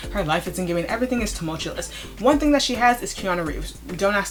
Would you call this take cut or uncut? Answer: uncut